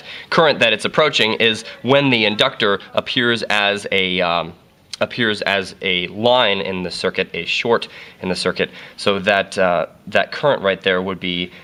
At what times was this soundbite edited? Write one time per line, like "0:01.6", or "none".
none